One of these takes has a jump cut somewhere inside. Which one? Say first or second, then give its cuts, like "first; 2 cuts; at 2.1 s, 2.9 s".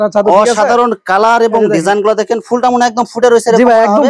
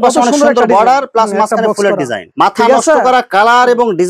second; 1 cut; at 2.2 s